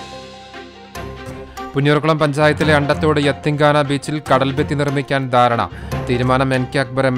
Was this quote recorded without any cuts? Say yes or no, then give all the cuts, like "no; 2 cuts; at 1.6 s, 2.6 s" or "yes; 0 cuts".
no; 1 cut; at 1.6 s